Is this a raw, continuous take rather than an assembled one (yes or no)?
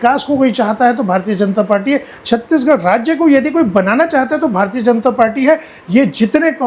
yes